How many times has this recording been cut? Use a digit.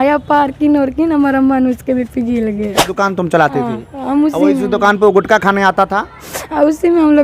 1